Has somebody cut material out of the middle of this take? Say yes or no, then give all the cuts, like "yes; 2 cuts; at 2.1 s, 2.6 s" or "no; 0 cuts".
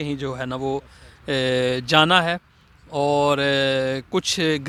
no; 0 cuts